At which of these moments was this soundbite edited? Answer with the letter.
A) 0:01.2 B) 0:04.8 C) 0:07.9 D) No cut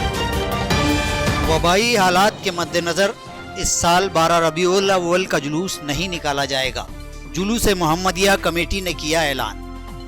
A